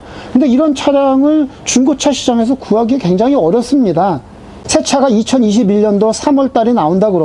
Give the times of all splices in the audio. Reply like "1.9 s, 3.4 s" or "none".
4.6 s